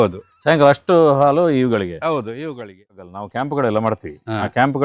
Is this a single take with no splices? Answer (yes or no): no